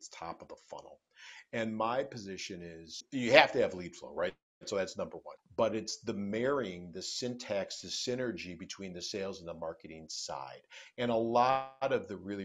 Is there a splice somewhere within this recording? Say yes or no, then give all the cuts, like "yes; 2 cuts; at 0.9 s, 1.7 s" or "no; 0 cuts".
yes; 2 cuts; at 3.0 s, 5.3 s